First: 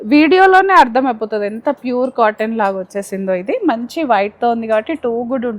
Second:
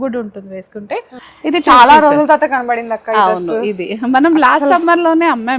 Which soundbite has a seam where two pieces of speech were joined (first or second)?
second